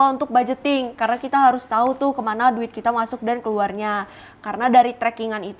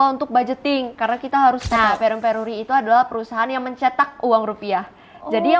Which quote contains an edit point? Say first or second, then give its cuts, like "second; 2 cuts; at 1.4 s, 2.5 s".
second; 1 cut; at 1.7 s